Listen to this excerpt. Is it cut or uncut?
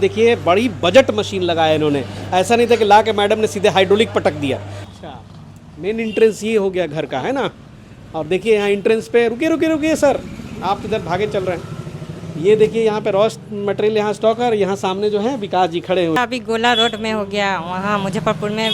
cut